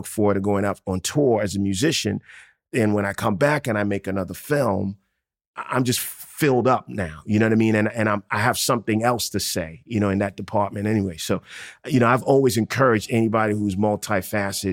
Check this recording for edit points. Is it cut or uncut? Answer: cut